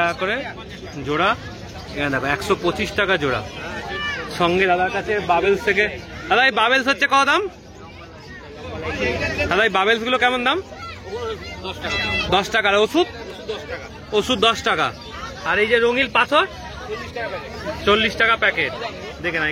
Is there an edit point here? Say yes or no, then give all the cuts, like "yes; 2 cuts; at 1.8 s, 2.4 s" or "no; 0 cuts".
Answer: no; 0 cuts